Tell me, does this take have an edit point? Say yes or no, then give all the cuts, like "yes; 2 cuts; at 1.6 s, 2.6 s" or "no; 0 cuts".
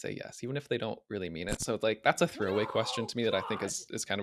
no; 0 cuts